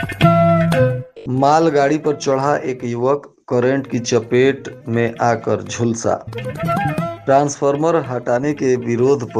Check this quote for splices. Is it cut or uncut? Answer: cut